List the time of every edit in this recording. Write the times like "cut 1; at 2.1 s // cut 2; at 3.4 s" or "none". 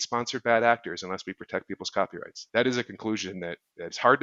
cut 1; at 2.3 s